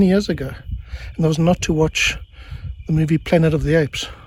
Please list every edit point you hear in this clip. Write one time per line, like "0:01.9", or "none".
none